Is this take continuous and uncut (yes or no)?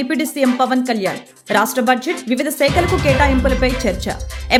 yes